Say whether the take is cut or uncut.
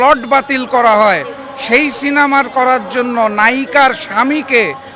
uncut